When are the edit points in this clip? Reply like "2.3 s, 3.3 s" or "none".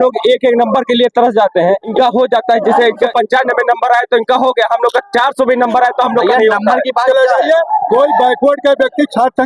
1.9 s, 3.1 s, 7.0 s